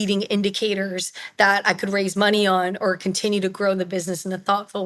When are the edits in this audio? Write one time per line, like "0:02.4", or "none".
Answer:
none